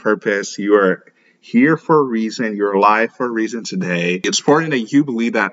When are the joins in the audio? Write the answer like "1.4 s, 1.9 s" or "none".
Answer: 4.2 s